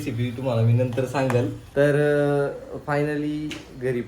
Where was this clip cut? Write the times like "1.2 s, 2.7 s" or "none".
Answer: 1.6 s